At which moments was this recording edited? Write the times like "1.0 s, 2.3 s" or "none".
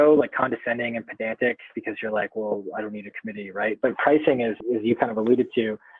4.6 s